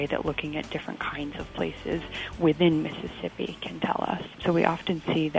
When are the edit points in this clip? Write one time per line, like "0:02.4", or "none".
0:04.3

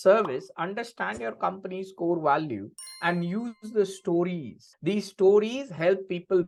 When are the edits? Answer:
none

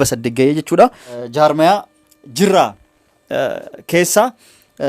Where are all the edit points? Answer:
0:01.2

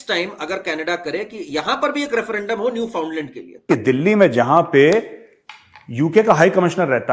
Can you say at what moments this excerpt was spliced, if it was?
0:03.7

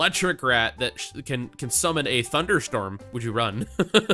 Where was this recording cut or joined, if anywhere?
0:03.1

